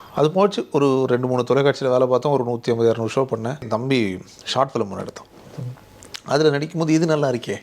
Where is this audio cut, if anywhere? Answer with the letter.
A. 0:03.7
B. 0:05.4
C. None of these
A